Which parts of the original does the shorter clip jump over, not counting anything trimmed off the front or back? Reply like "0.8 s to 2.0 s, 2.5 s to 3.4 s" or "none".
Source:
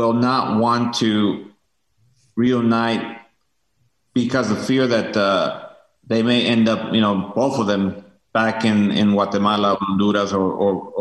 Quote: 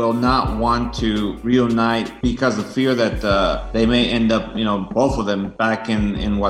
1.4 s to 2.3 s, 3.1 s to 4.0 s, 5.6 s to 6.0 s, 7.4 s to 7.7 s